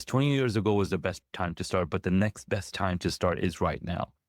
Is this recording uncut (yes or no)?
no